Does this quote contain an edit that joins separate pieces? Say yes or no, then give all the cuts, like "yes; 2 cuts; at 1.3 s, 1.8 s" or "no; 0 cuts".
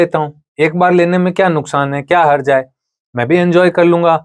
no; 0 cuts